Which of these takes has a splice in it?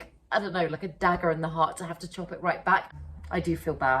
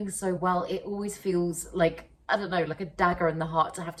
first; 1 cut; at 2.9 s

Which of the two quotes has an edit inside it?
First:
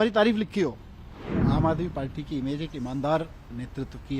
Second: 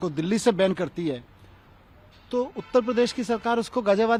first; 1 cut; at 1.3 s

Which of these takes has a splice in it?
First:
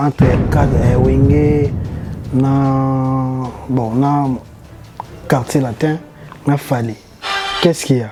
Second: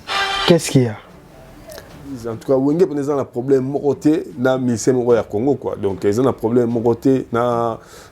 second; 1 cut; at 2.3 s

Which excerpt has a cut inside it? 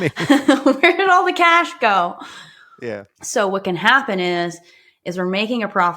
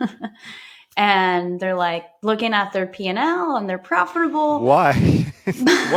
first; 1 cut; at 3.1 s

